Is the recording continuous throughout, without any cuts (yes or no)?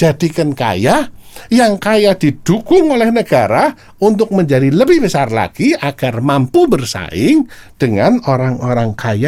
yes